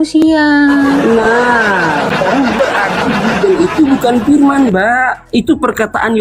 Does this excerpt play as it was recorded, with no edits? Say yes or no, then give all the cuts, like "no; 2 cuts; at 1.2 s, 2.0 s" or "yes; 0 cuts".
no; 1 cut; at 2.6 s